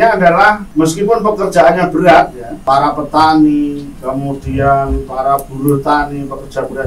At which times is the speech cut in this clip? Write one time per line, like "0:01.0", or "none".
0:02.6